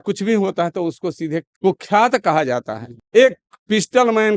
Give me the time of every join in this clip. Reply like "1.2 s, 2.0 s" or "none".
2.9 s